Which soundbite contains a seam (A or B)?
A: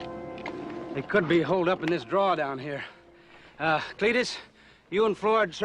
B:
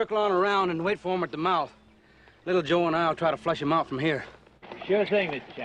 A